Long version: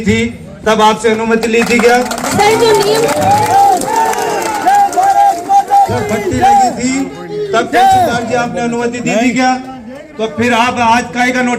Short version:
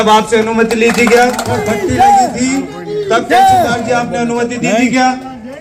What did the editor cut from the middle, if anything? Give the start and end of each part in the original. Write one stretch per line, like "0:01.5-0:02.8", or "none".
0:02.2-0:06.0